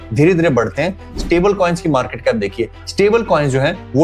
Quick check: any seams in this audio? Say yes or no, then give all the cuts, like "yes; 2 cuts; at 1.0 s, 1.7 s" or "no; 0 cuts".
yes; 1 cut; at 2.8 s